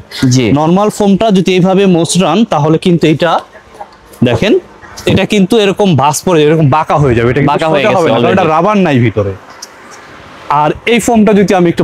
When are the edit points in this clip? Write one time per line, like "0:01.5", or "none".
none